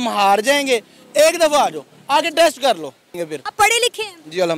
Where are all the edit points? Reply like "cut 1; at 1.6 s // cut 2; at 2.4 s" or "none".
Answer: cut 1; at 3.3 s